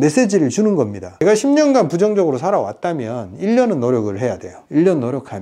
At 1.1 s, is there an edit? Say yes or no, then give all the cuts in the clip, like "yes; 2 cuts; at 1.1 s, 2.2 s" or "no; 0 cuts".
yes; 1 cut; at 1.1 s